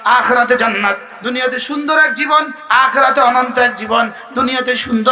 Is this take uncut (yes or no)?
no